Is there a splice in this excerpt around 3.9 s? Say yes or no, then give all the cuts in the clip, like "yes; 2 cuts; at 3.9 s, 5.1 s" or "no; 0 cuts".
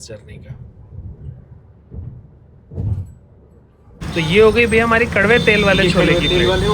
yes; 1 cut; at 3.9 s